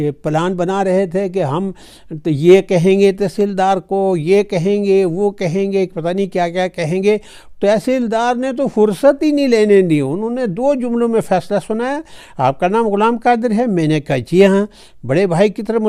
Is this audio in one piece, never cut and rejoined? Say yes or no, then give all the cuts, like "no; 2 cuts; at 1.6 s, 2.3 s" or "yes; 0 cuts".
yes; 0 cuts